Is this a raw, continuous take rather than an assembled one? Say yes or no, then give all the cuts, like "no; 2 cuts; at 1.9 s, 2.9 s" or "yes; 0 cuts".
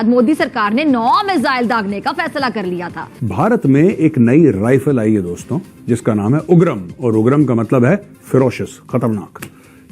no; 1 cut; at 3.1 s